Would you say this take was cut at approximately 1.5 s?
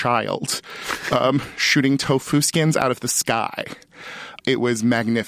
no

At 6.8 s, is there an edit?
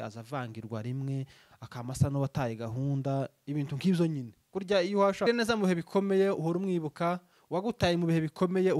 no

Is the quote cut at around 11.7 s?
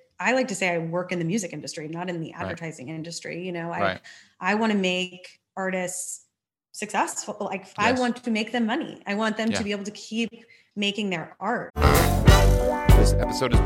yes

